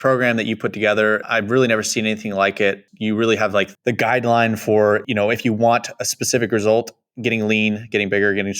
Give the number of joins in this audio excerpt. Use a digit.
2